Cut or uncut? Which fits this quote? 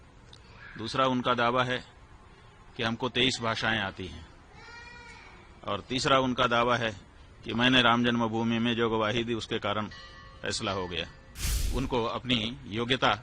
cut